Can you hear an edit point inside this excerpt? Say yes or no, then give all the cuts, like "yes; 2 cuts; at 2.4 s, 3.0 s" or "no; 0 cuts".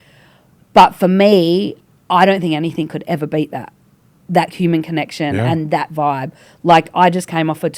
no; 0 cuts